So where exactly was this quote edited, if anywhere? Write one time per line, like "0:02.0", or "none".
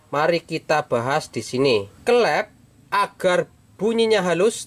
0:01.9